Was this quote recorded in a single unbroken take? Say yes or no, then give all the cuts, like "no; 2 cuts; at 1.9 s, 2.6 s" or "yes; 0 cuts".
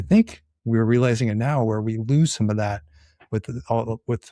yes; 0 cuts